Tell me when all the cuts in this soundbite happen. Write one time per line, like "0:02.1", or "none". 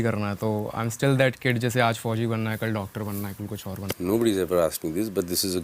0:04.0